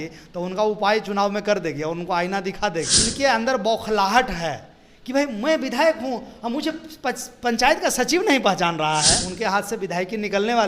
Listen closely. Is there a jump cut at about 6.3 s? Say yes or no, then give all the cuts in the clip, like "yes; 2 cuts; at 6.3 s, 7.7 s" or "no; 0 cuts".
no; 2 cuts; at 3.0 s, 9.2 s